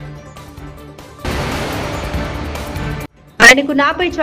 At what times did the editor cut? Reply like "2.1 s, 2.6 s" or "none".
1.2 s, 3.2 s